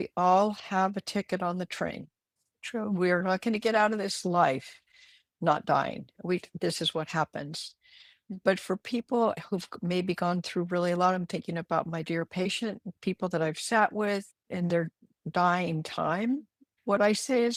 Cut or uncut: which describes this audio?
uncut